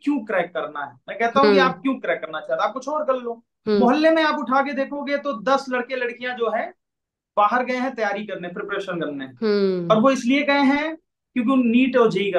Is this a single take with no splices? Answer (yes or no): yes